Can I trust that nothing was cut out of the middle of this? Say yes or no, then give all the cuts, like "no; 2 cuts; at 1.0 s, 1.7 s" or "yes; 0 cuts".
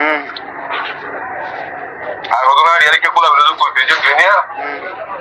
yes; 0 cuts